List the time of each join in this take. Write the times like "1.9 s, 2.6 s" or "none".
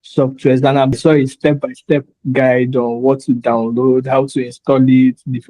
0.9 s

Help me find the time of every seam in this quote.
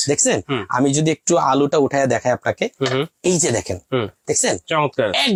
none

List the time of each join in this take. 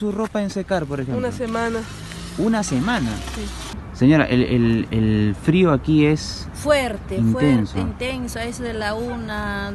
3.9 s

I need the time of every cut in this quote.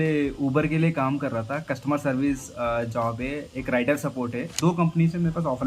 4.5 s

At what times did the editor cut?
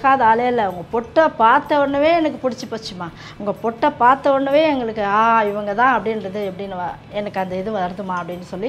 none

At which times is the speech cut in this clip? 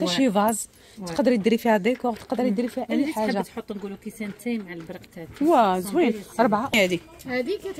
6.7 s

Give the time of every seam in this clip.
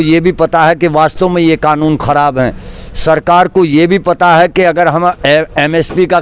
none

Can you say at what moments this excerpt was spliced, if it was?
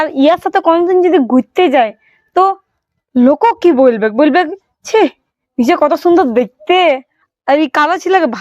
7.2 s

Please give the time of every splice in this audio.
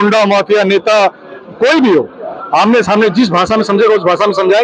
none

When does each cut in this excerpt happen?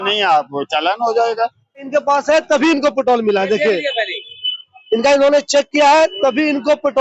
1.9 s

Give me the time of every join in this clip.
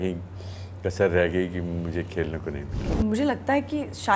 2.9 s

